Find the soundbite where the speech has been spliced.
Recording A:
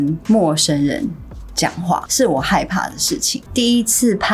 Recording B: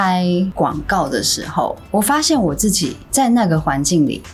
A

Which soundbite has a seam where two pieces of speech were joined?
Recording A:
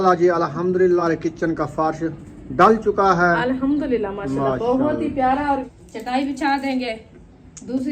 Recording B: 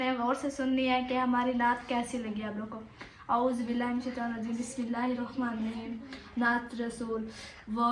A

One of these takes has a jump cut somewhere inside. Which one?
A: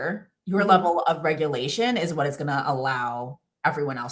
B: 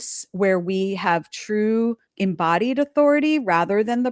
B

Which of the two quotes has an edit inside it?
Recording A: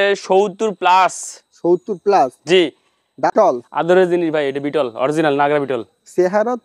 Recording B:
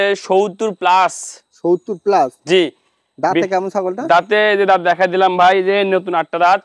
A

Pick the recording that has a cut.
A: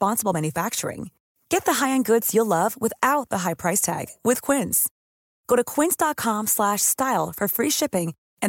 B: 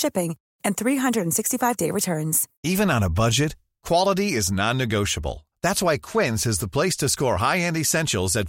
B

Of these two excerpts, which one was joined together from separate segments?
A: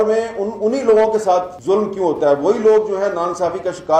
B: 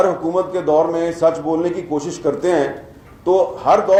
A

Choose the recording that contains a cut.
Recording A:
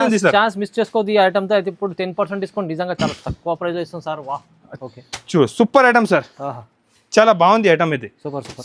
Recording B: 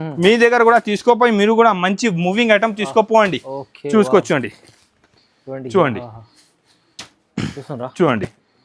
A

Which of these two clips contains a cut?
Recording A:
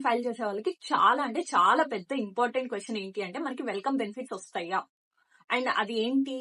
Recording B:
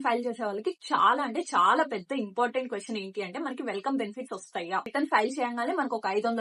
B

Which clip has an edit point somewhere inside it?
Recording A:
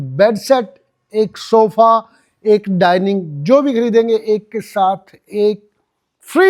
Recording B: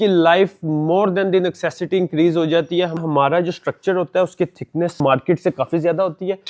B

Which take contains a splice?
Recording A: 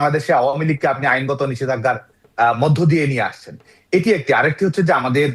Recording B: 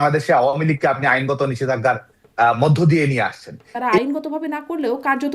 B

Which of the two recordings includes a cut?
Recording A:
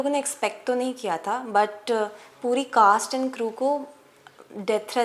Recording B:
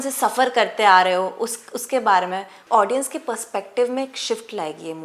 B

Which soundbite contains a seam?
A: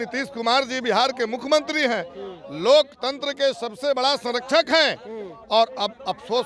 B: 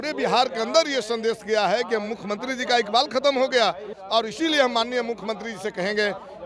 B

